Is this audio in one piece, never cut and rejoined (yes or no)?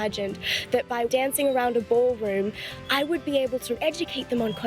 no